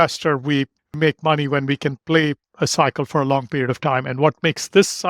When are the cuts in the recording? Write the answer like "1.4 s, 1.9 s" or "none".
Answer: 1.0 s